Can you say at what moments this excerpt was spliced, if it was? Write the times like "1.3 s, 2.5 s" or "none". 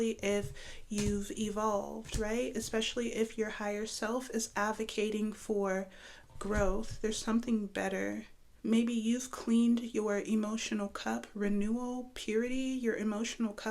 8.5 s